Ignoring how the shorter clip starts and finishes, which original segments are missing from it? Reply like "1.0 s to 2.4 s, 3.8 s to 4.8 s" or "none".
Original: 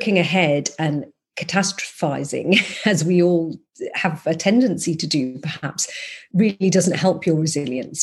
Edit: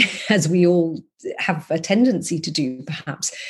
none